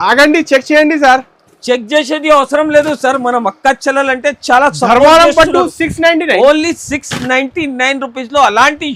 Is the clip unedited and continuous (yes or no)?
yes